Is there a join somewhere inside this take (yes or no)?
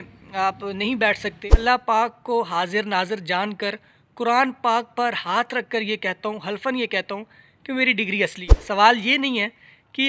yes